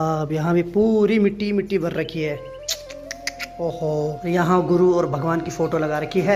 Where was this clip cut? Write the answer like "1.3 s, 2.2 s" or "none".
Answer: none